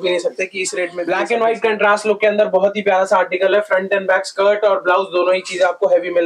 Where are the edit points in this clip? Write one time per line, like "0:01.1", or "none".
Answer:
0:01.0